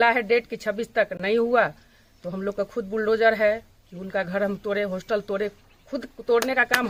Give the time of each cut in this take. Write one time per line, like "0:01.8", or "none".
none